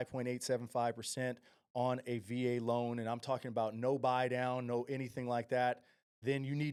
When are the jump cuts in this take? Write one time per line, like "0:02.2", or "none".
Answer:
none